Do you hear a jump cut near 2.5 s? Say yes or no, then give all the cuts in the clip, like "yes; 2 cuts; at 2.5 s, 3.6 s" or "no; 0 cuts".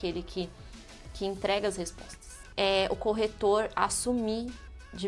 yes; 1 cut; at 2.5 s